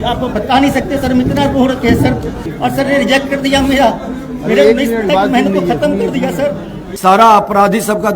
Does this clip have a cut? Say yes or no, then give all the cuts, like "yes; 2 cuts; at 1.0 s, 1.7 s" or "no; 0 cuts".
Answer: yes; 2 cuts; at 2.4 s, 6.9 s